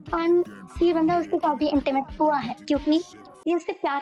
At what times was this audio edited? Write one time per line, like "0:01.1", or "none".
none